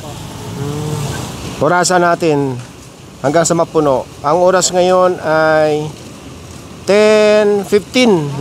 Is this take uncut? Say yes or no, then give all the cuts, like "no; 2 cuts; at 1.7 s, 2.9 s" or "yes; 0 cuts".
no; 1 cut; at 1.3 s